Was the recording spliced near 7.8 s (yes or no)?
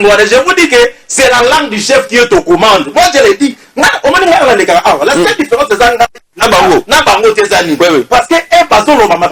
no